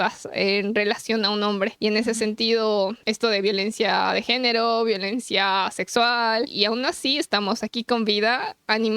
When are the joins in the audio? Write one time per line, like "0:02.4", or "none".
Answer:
0:01.7
0:03.0
0:06.5